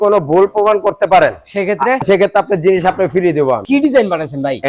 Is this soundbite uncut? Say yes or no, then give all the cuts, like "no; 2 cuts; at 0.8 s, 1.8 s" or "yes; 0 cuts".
no; 2 cuts; at 2.0 s, 3.6 s